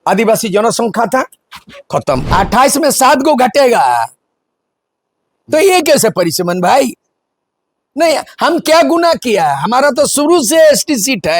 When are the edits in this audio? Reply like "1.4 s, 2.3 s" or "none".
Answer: 2.2 s